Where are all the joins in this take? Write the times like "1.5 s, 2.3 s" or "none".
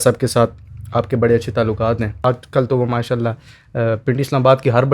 2.2 s